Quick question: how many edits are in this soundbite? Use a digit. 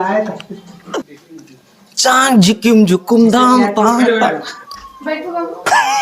1